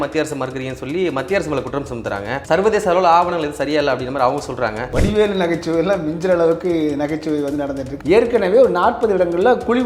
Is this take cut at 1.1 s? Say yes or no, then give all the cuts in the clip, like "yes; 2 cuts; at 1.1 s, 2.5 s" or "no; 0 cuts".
no; 3 cuts; at 2.3 s, 4.8 s, 7.9 s